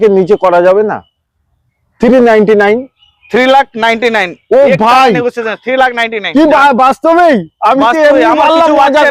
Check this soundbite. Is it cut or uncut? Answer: uncut